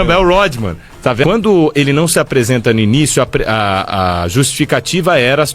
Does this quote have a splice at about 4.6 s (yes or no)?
no